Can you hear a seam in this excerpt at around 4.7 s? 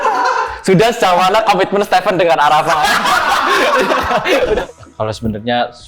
yes; 1 cut; at 4.7 s

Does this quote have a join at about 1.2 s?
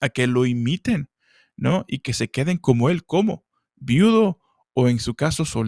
no; 0 cuts

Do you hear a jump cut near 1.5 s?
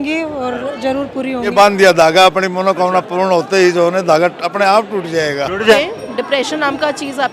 yes; 2 cuts; at 1.5 s, 5.8 s

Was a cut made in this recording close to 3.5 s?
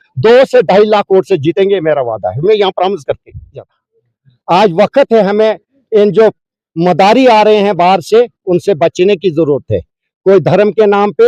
yes; 1 cut; at 3.5 s

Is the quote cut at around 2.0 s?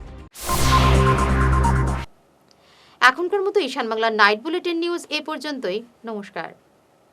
no; 0 cuts

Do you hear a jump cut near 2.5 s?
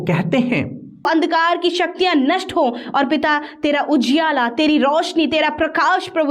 no; 1 cut; at 1.0 s

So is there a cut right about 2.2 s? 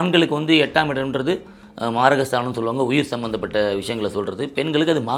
no; 0 cuts

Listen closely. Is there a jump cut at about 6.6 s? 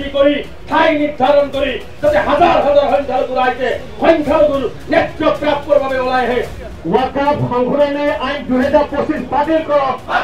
yes; 1 cut; at 6.6 s

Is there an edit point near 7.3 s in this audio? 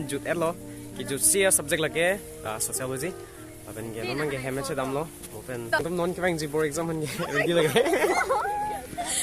no; 1 cut; at 5.8 s

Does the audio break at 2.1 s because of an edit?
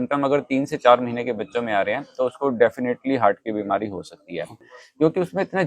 no; 1 cut; at 4.7 s

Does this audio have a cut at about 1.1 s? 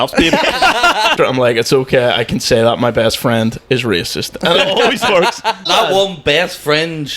yes; 2 cuts; at 1.1 s, 5.6 s

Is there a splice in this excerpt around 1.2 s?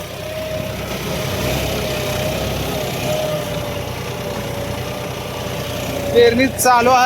yes; 1 cut; at 1.2 s

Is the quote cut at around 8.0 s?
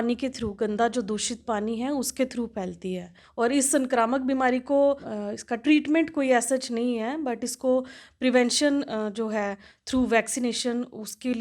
no; 2 cuts; at 3.2 s, 5.1 s

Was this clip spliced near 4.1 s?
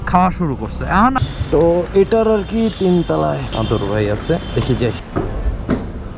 no; 1 cut; at 1.2 s

